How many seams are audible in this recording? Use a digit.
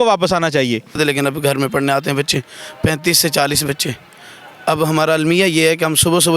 1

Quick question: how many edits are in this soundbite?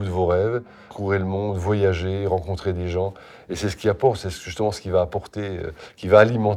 1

